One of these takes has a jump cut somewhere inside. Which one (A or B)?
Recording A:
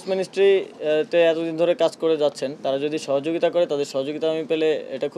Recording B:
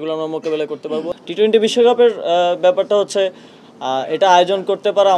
B